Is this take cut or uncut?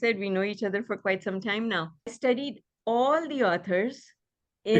cut